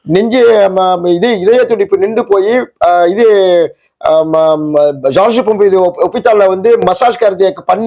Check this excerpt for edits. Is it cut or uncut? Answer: uncut